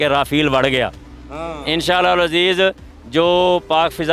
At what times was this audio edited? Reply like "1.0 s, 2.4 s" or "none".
none